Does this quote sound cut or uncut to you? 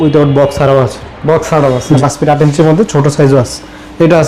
cut